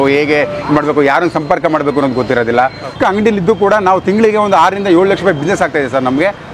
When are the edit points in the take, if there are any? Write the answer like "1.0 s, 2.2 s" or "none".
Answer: 2.9 s